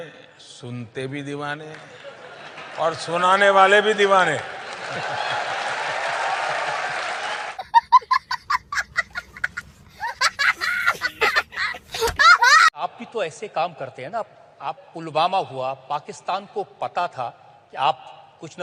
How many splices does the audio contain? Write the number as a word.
zero